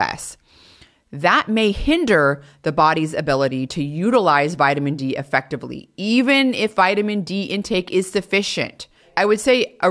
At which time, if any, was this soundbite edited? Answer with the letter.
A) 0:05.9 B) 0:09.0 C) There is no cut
B